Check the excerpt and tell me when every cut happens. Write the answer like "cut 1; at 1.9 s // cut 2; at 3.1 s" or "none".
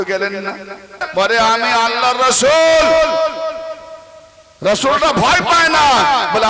cut 1; at 1.0 s

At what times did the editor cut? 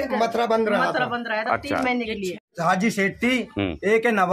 cut 1; at 2.5 s

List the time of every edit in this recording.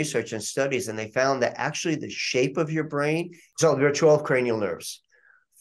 cut 1; at 3.4 s

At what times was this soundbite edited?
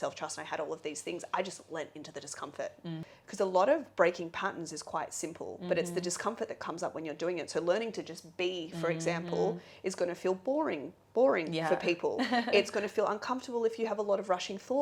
cut 1; at 3.1 s

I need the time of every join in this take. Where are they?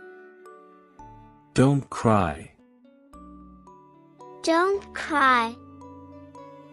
cut 1; at 1.3 s // cut 2; at 2.5 s // cut 3; at 4.2 s // cut 4; at 5.6 s

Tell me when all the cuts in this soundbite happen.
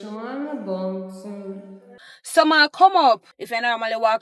cut 1; at 2.0 s // cut 2; at 3.3 s

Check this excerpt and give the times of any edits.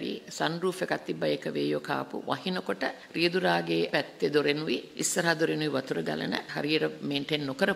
cut 1; at 3.0 s // cut 2; at 3.9 s // cut 3; at 4.9 s // cut 4; at 6.5 s

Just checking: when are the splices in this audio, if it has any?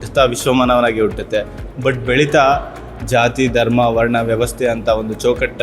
none

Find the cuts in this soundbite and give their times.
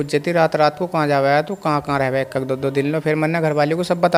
none

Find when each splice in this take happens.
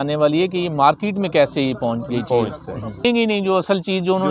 cut 1; at 3.0 s

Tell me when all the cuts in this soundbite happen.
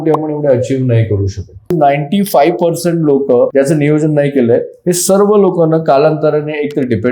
cut 1; at 1.7 s // cut 2; at 3.5 s

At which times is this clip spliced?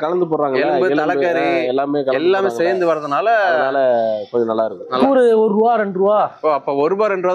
cut 1; at 5.0 s

